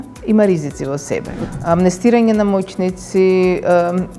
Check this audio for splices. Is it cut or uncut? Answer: cut